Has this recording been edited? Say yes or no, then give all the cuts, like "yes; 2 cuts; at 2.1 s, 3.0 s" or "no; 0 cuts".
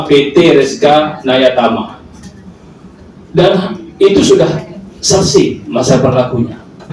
no; 0 cuts